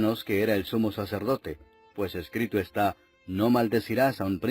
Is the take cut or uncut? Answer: cut